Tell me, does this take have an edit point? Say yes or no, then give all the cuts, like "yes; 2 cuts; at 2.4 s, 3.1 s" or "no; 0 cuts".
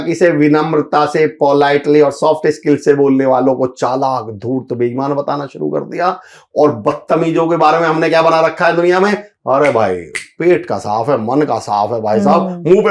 no; 0 cuts